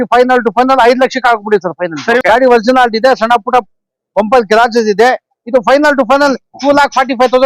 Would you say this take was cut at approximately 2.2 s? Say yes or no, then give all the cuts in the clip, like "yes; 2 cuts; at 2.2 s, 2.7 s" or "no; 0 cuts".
yes; 1 cut; at 2.2 s